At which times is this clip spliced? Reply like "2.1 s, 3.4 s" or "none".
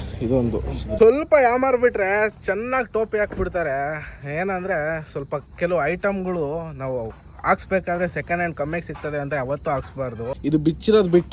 1.0 s, 10.3 s